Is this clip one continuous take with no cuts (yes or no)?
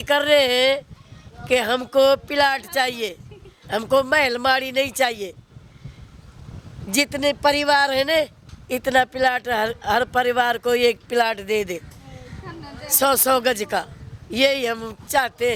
yes